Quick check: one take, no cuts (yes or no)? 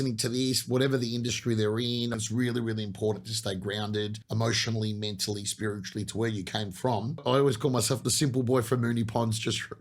no